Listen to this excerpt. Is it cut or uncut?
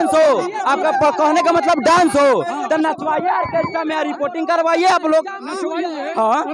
uncut